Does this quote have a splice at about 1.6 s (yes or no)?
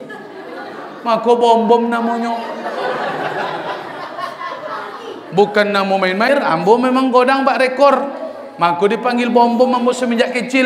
no